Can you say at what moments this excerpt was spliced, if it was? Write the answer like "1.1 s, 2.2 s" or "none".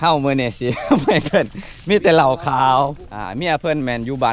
3.1 s